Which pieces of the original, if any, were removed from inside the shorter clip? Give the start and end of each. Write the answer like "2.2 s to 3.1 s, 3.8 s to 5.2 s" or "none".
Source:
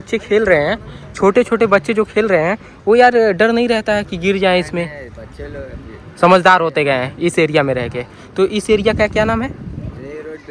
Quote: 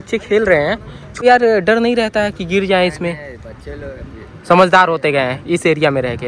1.2 s to 2.9 s